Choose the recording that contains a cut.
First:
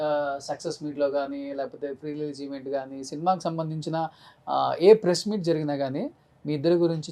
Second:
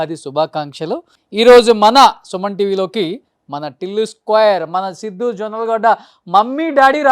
second; 1 cut; at 1.2 s

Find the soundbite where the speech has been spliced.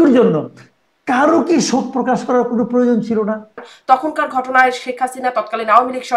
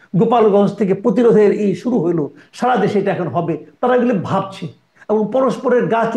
first; 1 cut; at 3.7 s

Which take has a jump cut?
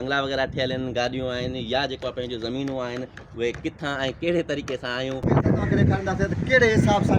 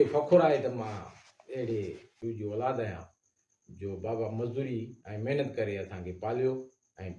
first; 1 cut; at 5.4 s

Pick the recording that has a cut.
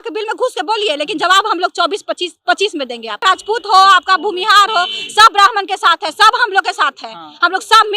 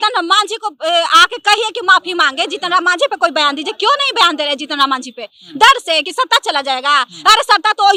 first; 1 cut; at 3.2 s

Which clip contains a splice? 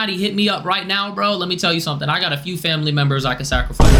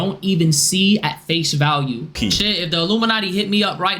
second; 1 cut; at 2.1 s

